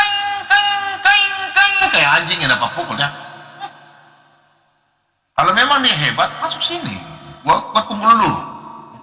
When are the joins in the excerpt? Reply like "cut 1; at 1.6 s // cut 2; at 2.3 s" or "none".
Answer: cut 1; at 1.7 s

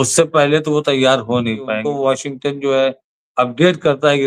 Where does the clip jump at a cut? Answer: cut 1; at 1.8 s

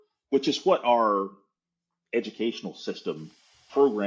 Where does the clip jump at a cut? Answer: none

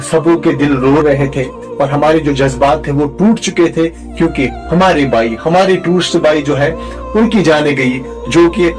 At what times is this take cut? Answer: none

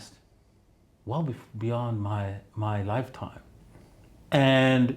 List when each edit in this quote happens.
cut 1; at 3.5 s

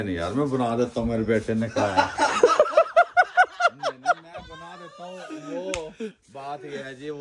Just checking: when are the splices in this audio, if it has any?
none

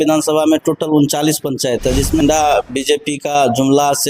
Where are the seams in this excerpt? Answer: cut 1; at 2.2 s

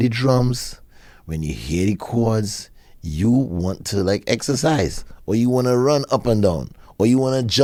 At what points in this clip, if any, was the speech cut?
none

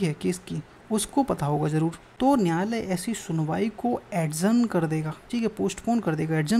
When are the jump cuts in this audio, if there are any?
cut 1; at 2.0 s // cut 2; at 5.2 s

